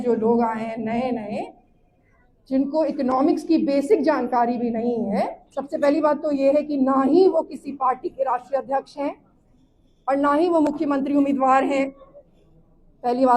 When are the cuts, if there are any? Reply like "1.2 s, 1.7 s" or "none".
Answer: 5.4 s